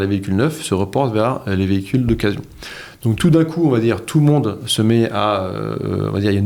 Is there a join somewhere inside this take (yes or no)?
no